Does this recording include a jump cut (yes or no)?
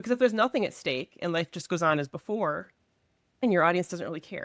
yes